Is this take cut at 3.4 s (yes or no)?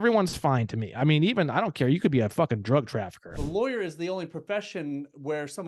yes